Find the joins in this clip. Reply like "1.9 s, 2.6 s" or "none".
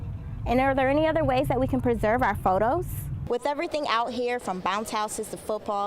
3.1 s